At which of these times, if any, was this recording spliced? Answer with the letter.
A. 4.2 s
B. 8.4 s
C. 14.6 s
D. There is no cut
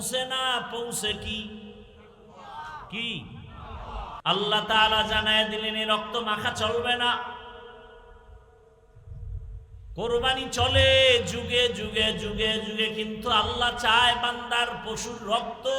A